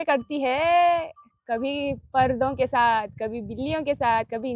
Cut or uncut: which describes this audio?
uncut